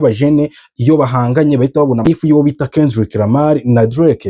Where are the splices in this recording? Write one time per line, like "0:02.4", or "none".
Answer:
0:02.2